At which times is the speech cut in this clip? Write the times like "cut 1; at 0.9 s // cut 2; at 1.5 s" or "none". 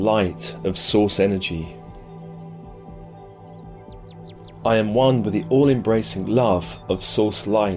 cut 1; at 1.7 s // cut 2; at 4.6 s